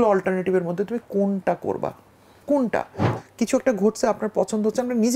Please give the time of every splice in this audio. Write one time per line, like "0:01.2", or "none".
0:03.0